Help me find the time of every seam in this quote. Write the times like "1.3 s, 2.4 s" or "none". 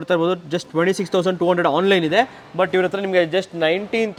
none